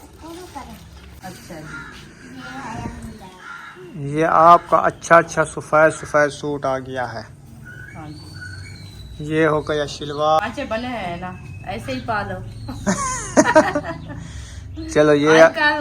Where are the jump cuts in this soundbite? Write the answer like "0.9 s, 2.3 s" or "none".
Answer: 1.1 s, 10.4 s